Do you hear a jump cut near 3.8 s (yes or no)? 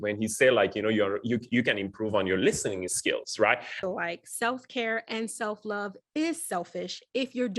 yes